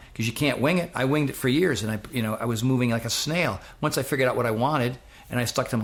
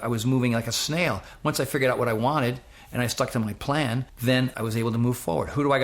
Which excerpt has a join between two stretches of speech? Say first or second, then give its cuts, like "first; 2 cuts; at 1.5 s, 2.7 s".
second; 1 cut; at 4.4 s